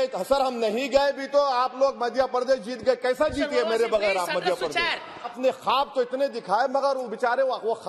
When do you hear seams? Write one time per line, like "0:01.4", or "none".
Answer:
0:05.3